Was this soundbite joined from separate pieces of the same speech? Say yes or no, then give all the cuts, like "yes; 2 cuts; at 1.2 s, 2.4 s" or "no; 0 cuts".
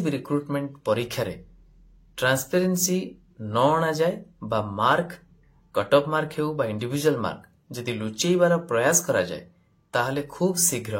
no; 0 cuts